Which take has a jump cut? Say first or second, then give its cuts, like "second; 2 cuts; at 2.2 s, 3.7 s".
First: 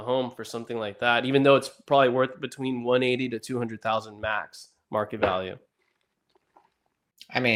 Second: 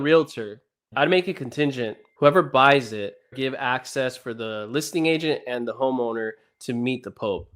second; 3 cuts; at 0.9 s, 2.0 s, 3.3 s